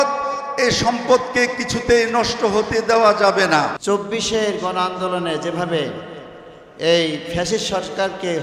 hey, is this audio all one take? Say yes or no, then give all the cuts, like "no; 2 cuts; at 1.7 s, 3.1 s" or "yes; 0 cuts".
no; 1 cut; at 3.8 s